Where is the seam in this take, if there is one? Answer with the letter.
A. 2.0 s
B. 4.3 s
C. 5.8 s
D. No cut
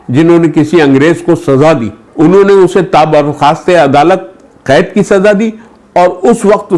A